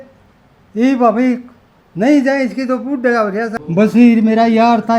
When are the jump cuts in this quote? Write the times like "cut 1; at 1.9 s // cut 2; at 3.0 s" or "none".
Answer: cut 1; at 3.5 s